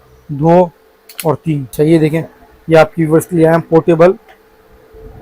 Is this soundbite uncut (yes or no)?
no